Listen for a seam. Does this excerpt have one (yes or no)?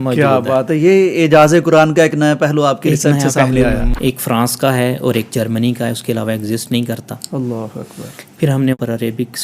yes